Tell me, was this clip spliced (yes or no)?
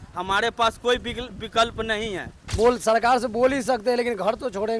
yes